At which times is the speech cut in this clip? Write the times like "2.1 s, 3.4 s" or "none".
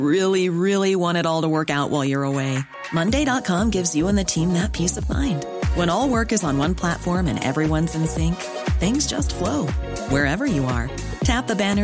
none